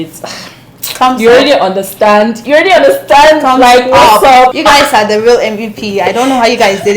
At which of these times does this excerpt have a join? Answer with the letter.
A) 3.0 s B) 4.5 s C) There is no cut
B